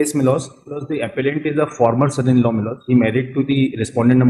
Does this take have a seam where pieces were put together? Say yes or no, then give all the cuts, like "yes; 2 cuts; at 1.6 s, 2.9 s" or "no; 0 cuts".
no; 0 cuts